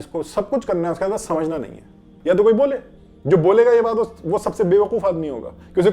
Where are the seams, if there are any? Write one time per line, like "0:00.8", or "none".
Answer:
0:02.1